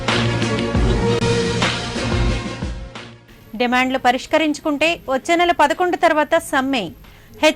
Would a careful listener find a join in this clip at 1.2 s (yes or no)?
yes